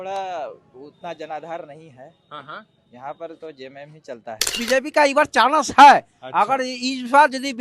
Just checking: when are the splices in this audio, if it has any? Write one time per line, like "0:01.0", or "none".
0:04.6